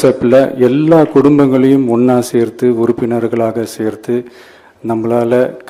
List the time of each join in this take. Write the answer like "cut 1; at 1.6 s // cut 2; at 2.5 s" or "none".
none